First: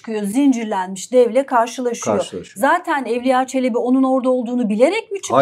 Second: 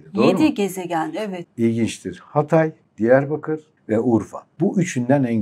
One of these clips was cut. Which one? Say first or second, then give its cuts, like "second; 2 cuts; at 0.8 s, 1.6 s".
second; 4 cuts; at 1.3 s, 2.8 s, 3.7 s, 4.4 s